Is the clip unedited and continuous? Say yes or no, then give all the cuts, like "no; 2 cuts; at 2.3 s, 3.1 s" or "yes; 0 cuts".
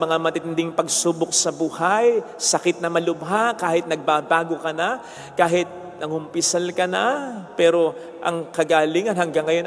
yes; 0 cuts